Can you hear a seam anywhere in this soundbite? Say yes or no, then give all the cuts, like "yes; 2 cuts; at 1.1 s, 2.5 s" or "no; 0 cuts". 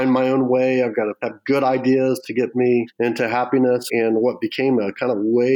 yes; 3 cuts; at 1.3 s, 2.9 s, 3.8 s